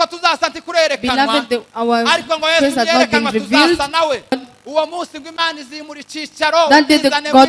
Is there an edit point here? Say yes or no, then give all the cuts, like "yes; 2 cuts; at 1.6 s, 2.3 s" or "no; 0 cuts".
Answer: yes; 1 cut; at 4.4 s